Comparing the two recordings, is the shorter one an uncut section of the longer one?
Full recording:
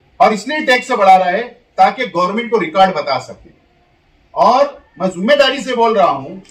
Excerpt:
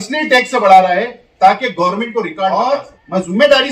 no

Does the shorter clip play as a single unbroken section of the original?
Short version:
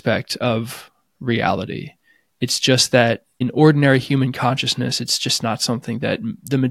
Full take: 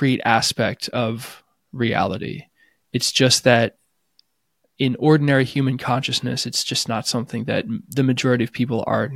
no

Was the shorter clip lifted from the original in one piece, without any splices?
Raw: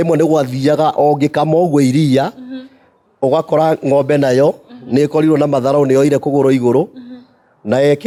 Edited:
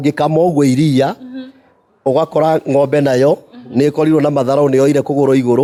yes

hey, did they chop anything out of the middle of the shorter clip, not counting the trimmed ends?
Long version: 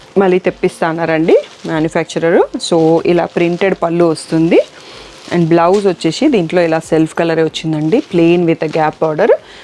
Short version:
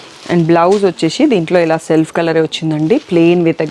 no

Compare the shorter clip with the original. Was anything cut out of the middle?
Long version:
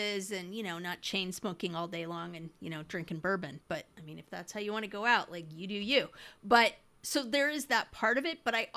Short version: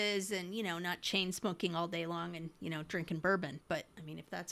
no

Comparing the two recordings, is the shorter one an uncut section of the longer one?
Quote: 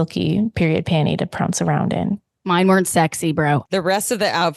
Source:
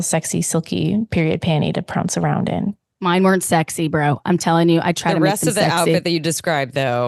no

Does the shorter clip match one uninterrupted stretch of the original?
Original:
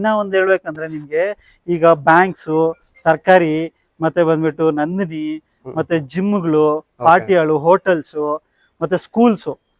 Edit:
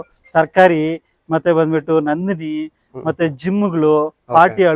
yes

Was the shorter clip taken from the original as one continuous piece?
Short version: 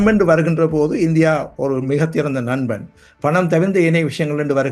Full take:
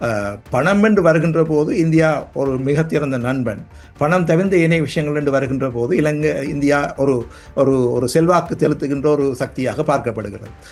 yes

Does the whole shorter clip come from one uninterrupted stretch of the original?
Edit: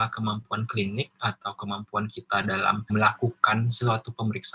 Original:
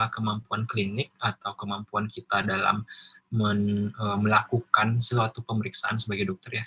no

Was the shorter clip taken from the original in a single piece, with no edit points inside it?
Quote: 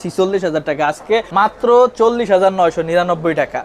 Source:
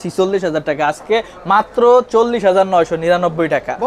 no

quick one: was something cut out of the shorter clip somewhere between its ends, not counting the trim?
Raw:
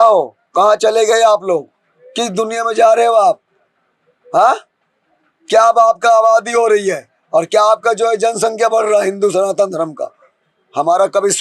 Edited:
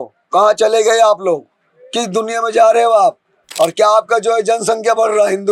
yes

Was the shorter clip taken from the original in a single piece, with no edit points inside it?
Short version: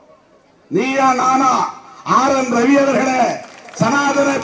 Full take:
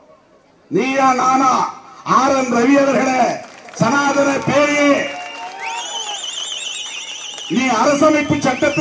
yes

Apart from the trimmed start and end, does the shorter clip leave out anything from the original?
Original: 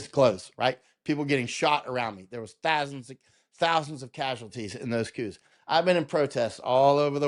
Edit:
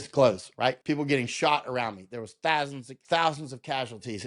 yes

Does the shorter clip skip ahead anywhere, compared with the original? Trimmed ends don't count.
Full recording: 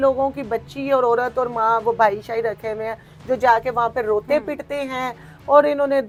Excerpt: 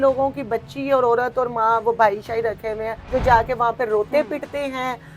yes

